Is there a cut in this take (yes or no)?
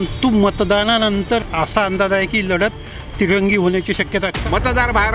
yes